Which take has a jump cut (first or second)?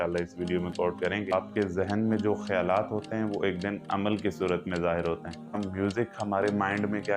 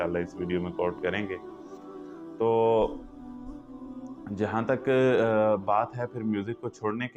first